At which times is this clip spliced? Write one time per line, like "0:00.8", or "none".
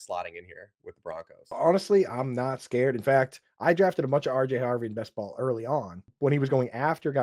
0:01.4
0:06.0